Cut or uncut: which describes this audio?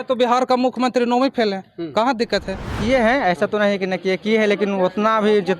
cut